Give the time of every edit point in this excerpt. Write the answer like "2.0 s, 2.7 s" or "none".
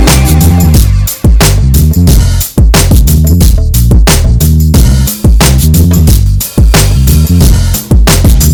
none